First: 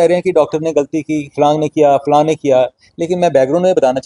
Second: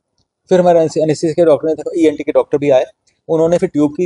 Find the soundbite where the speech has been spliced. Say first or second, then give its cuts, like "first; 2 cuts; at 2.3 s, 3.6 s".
first; 1 cut; at 2.0 s